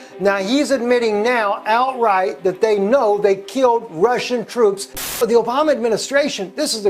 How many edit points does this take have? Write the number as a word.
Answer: one